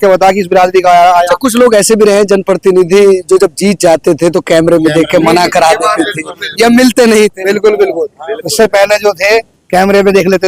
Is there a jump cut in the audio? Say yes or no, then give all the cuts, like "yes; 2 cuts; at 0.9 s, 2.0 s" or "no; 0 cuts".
no; 0 cuts